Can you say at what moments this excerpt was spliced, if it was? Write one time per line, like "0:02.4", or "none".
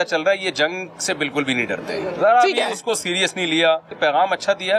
0:03.9